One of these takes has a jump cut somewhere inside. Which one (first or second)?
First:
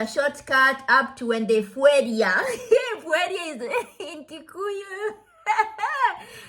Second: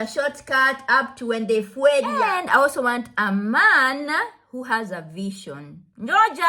second